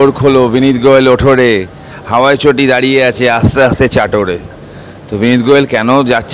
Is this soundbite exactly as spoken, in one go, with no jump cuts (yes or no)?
yes